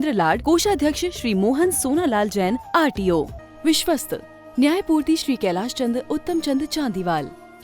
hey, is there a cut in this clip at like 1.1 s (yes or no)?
no